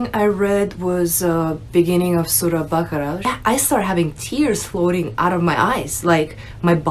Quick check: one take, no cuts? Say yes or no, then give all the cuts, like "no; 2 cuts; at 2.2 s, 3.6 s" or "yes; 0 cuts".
no; 1 cut; at 3.3 s